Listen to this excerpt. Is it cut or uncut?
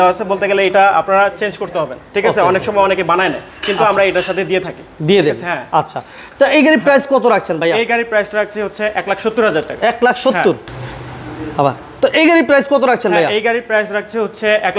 uncut